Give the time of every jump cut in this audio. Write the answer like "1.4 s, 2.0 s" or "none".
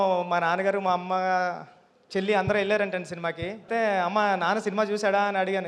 3.7 s